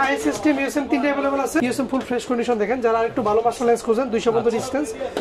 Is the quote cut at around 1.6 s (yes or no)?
yes